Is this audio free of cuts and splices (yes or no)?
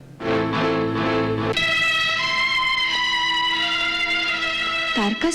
yes